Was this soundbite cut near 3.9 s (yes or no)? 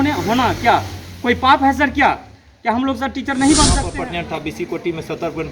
yes